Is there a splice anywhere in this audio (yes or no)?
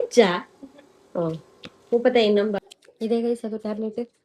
yes